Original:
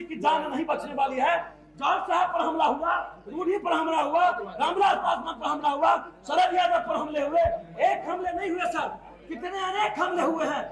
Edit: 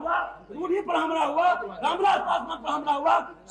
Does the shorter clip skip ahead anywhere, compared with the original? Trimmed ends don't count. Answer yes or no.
no